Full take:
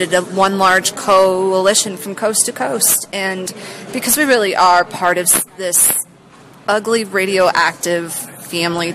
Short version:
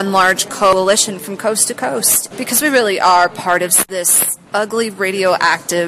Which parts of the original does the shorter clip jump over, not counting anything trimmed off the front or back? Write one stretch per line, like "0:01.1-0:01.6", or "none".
0:01.2-0:01.5
0:03.0-0:03.7
0:05.4-0:06.0